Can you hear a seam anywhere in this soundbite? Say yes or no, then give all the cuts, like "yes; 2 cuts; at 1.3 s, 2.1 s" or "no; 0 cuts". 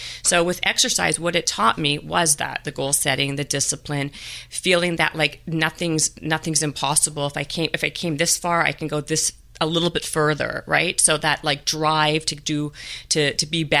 no; 0 cuts